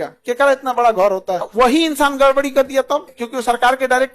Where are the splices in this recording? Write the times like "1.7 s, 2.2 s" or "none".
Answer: 1.5 s, 3.1 s